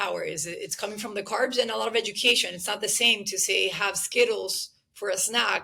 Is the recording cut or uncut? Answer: uncut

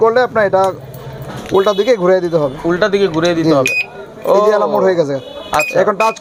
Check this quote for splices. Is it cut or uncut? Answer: uncut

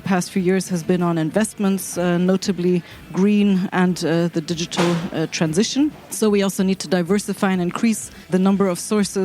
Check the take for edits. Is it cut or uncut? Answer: cut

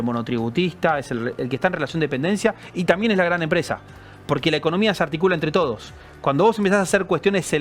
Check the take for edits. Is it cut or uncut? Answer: uncut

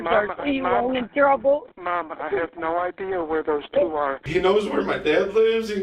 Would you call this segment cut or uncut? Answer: cut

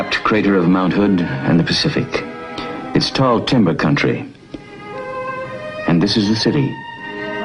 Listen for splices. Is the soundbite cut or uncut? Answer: cut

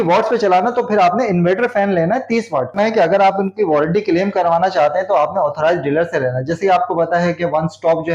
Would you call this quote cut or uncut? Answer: cut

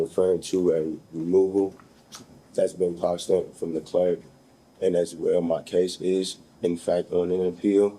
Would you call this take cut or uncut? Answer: uncut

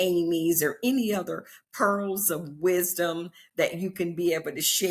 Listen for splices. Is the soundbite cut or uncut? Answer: uncut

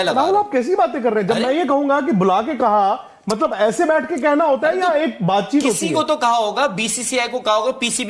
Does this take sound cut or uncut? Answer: uncut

